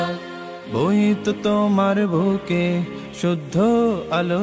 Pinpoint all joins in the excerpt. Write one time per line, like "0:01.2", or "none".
none